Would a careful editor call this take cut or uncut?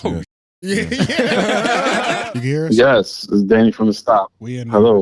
cut